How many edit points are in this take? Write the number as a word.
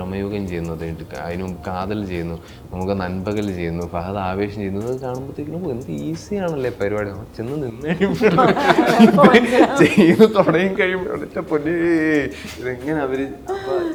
zero